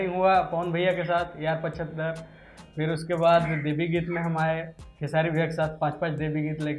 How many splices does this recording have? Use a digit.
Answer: 0